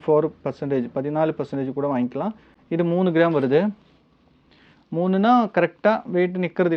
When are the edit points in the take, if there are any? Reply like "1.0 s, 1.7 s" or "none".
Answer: none